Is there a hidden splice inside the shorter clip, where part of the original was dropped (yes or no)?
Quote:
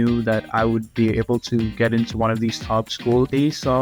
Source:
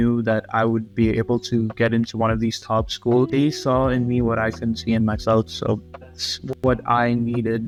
no